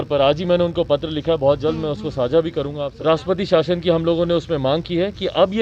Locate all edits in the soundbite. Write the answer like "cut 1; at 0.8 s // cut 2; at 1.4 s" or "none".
cut 1; at 2.9 s